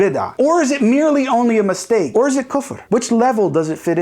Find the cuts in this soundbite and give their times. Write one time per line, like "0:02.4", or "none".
0:02.1